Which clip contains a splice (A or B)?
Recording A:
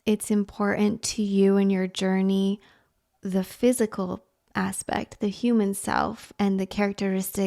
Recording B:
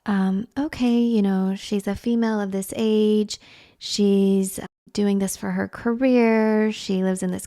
B